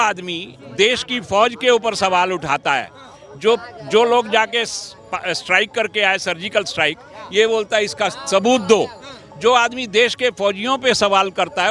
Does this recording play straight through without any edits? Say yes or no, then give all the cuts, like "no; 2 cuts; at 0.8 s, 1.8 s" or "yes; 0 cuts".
yes; 0 cuts